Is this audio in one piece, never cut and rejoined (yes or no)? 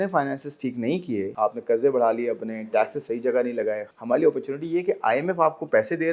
no